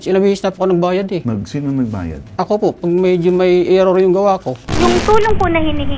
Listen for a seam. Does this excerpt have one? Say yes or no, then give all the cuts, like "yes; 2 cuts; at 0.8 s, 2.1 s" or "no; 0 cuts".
yes; 2 cuts; at 1.2 s, 4.7 s